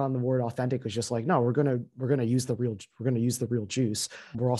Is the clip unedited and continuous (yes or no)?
yes